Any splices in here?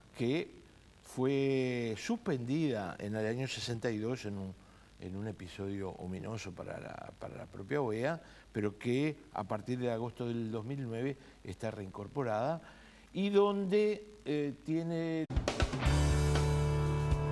no; 0 cuts

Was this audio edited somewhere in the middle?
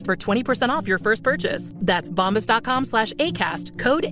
no; 0 cuts

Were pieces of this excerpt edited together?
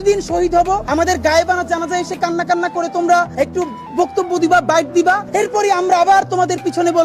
yes; 3 cuts; at 0.8 s, 3.3 s, 5.2 s

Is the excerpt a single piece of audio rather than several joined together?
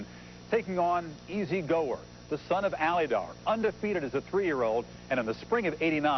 no; 1 cut; at 2.5 s

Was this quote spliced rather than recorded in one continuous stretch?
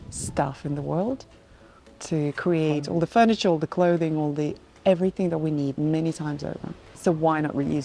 yes; 1 cut; at 6.9 s

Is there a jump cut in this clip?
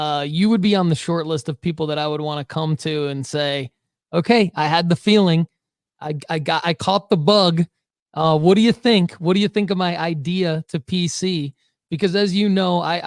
no; 0 cuts

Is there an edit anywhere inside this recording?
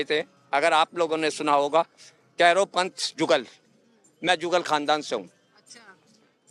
no; 0 cuts

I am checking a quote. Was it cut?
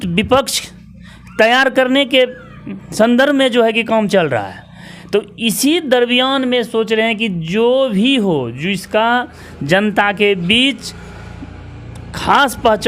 no; 0 cuts

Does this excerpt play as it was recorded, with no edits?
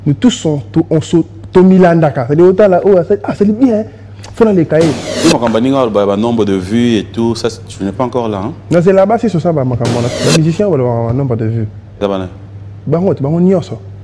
no; 2 cuts; at 5.1 s, 10.1 s

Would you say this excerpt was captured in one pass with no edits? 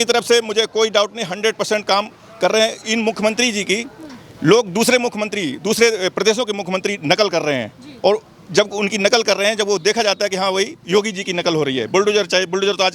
yes; 0 cuts

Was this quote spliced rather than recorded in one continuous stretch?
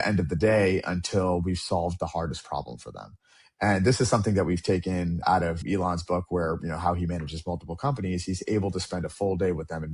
yes; 1 cut; at 5.2 s

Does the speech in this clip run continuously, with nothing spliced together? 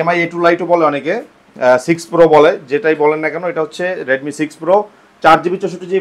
yes; 0 cuts

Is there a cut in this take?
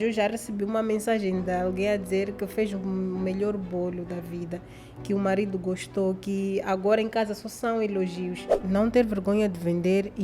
yes; 1 cut; at 8.5 s

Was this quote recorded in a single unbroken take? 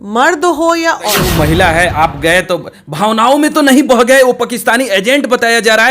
no; 1 cut; at 1.1 s

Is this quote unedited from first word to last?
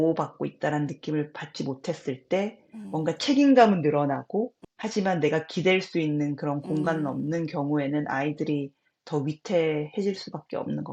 no; 1 cut; at 4.6 s

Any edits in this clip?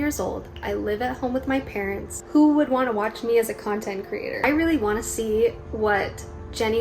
yes; 2 cuts; at 2.1 s, 4.4 s

